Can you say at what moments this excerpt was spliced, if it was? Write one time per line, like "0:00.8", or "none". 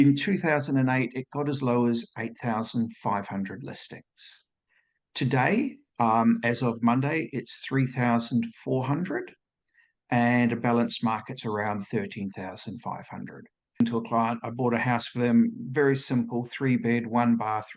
0:13.8